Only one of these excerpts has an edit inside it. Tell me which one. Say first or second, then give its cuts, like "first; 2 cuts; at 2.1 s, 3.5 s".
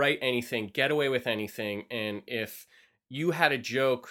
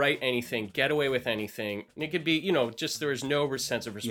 second; 1 cut; at 1.9 s